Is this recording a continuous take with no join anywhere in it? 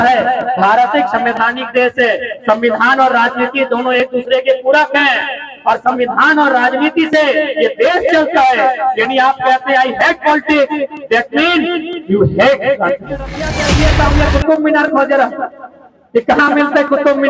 no; 1 cut; at 13.7 s

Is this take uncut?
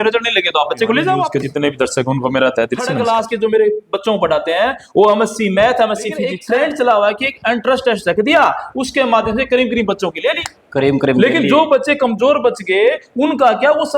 no; 3 cuts; at 1.3 s, 2.9 s, 6.4 s

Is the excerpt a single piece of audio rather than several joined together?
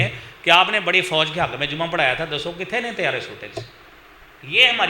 yes; 0 cuts

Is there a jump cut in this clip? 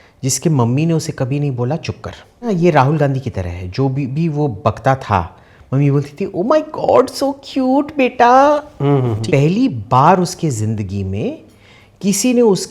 yes; 2 cuts; at 2.5 s, 9.2 s

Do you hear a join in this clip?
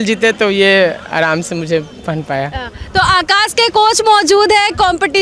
no; 0 cuts

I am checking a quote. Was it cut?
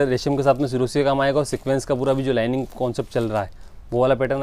no; 0 cuts

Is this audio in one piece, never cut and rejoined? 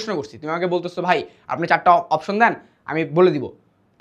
yes; 0 cuts

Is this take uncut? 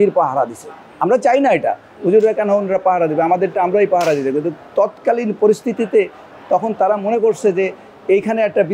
yes; 0 cuts

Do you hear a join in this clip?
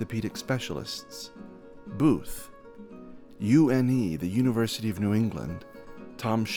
no; 0 cuts

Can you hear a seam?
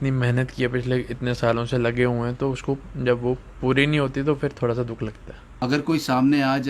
yes; 1 cut; at 5.6 s

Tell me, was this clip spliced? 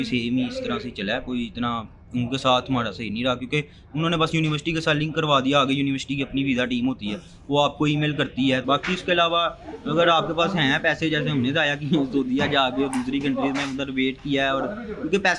yes; 1 cut; at 8.6 s

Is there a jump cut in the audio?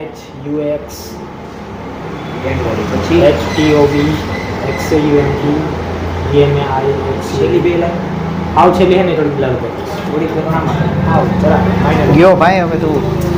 no; 0 cuts

